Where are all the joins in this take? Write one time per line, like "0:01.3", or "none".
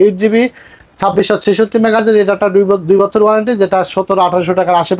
none